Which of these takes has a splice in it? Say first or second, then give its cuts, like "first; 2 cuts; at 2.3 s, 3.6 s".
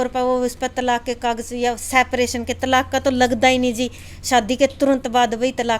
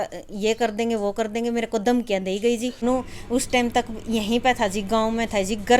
second; 1 cut; at 2.8 s